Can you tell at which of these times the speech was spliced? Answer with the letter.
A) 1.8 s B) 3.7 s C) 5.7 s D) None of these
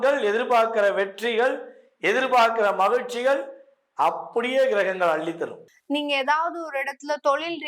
C